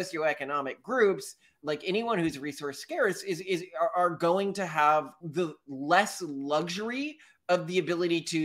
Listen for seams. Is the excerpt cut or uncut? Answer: uncut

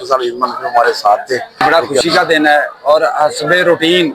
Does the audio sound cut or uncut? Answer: cut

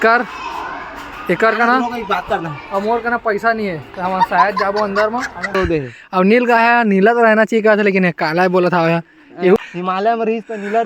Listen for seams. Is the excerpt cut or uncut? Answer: cut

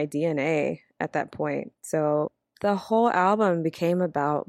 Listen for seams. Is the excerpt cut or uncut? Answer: cut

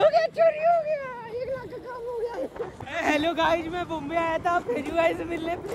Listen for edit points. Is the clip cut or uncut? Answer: uncut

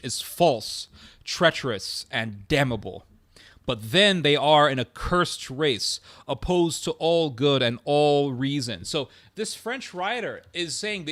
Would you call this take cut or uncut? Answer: uncut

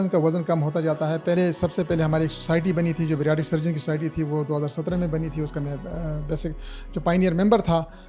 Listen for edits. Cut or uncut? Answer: cut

